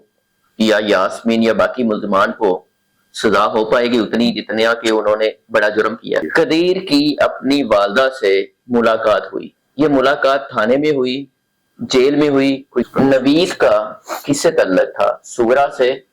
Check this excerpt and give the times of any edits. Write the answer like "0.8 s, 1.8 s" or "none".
6.2 s, 12.9 s